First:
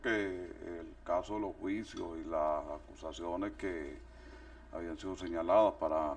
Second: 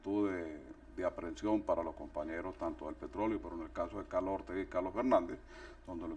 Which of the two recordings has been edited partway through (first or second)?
first